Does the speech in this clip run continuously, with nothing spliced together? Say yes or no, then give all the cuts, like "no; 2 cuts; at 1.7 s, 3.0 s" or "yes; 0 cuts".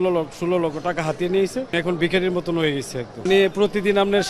no; 2 cuts; at 1.7 s, 3.3 s